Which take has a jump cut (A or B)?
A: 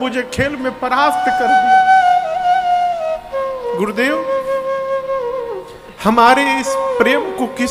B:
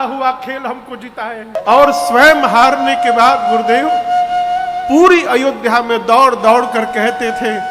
B